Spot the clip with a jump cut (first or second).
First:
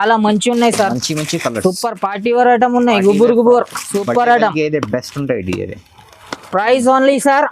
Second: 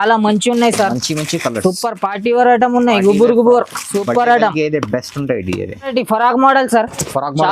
second